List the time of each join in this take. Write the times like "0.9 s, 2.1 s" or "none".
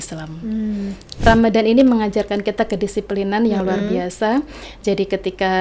1.0 s